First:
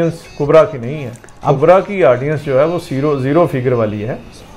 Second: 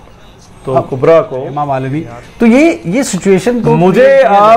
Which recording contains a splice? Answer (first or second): second